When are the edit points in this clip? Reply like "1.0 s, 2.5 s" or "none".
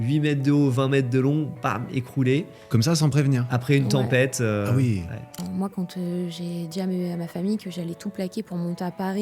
5.4 s